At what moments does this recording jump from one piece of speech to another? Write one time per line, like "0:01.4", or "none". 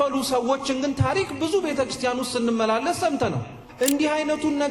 0:03.6